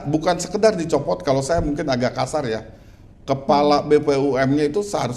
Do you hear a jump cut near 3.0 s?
no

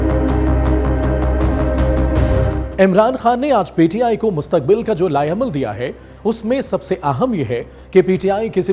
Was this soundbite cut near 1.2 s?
no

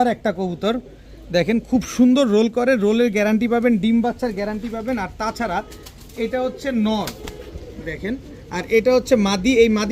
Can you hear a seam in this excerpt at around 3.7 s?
no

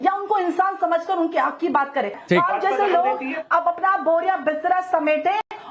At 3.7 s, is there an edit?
no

